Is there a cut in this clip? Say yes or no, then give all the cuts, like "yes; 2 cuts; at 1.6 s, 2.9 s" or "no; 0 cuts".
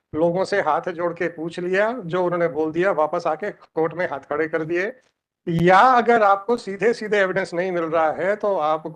no; 0 cuts